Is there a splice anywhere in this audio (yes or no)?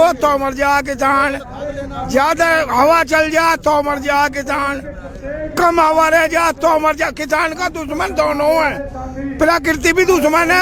no